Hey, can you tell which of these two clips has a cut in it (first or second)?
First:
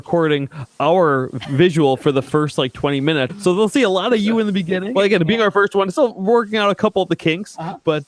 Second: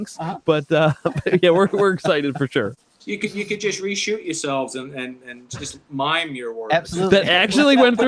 first